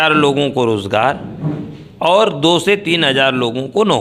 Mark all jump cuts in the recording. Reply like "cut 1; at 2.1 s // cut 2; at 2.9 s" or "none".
none